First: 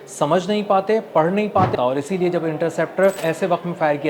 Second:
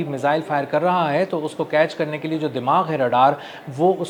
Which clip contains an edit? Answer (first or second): first